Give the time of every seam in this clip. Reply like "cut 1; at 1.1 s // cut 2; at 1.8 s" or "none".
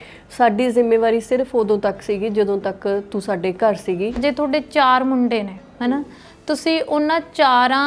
cut 1; at 4.2 s

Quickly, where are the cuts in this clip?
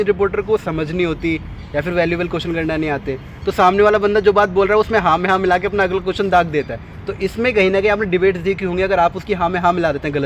none

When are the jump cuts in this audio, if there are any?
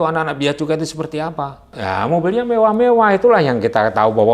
cut 1; at 1.8 s

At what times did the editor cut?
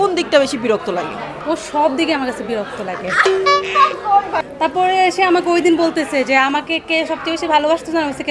cut 1; at 1.3 s // cut 2; at 4.4 s

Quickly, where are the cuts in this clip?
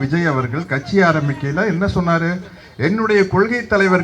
none

